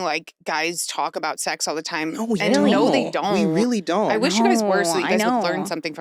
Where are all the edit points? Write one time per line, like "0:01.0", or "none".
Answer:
none